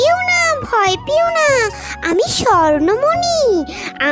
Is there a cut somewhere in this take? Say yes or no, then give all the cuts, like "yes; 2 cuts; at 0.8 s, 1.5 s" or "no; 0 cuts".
no; 0 cuts